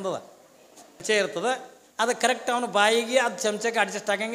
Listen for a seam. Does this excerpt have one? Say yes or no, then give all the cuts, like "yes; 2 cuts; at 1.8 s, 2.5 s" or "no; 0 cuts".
yes; 1 cut; at 1.0 s